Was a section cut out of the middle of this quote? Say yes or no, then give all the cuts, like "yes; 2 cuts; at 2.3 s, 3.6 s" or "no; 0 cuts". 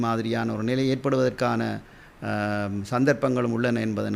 no; 0 cuts